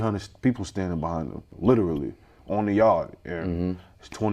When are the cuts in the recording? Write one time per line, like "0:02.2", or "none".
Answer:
0:01.5